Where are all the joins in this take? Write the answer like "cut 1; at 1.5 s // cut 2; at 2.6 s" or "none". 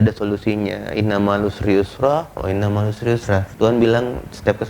cut 1; at 3.5 s